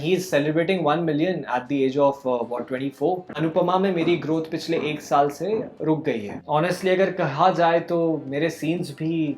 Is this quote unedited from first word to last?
no; 2 cuts; at 3.3 s, 6.4 s

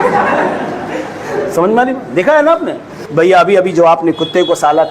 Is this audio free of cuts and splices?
no; 1 cut; at 3.0 s

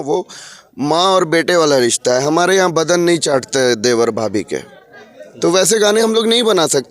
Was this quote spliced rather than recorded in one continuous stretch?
no; 0 cuts

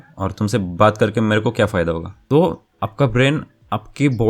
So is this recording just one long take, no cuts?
no; 1 cut; at 2.3 s

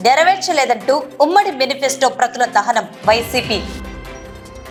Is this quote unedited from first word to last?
yes; 0 cuts

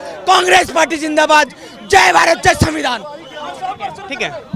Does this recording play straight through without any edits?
yes; 0 cuts

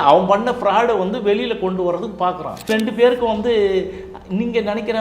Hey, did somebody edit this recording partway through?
yes; 1 cut; at 2.7 s

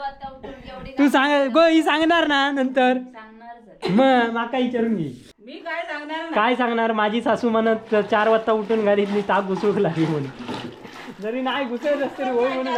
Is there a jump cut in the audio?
no; 0 cuts

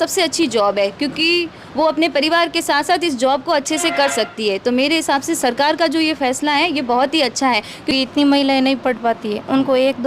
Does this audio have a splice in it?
yes; 1 cut; at 7.9 s

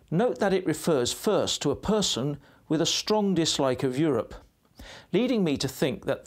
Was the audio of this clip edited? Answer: no; 0 cuts

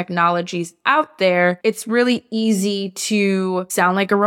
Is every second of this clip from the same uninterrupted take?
no; 1 cut; at 1.6 s

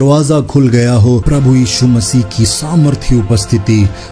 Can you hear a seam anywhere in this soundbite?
yes; 1 cut; at 1.2 s

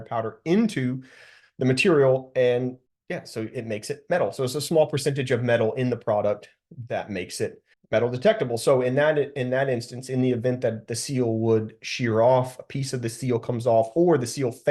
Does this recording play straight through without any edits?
no; 2 cuts; at 2.9 s, 7.7 s

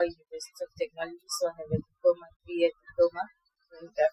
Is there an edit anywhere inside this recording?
no; 0 cuts

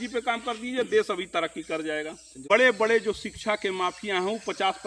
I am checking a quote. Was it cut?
yes; 1 cut; at 2.5 s

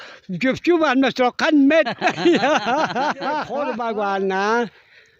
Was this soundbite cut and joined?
yes; 1 cut; at 3.7 s

